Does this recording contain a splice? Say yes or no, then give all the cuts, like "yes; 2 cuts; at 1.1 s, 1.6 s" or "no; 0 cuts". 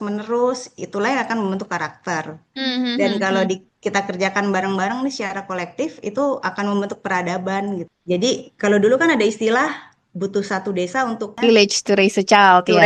yes; 2 cuts; at 7.9 s, 11.4 s